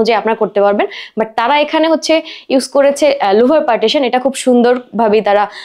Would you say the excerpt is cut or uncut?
uncut